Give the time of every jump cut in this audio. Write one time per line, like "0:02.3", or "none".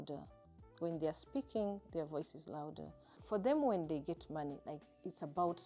0:03.2